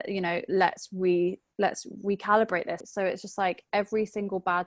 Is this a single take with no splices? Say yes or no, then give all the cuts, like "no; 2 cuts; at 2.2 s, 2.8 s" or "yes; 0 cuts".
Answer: no; 1 cut; at 2.8 s